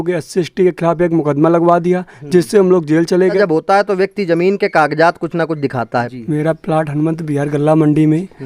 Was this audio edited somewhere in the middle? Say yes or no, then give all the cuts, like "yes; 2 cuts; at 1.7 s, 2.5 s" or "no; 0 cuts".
yes; 2 cuts; at 3.4 s, 6.1 s